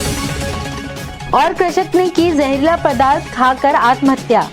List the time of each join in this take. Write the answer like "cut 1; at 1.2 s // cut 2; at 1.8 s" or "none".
cut 1; at 1.2 s